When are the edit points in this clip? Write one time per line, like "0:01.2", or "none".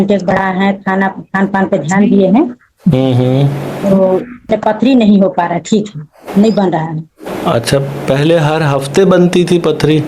0:04.5